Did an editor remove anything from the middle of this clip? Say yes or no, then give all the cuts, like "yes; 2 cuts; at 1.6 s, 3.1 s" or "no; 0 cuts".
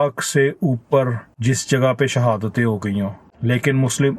yes; 2 cuts; at 1.3 s, 3.3 s